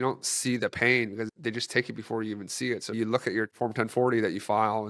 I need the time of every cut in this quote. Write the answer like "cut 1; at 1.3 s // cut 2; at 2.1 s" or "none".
cut 1; at 1.3 s // cut 2; at 2.9 s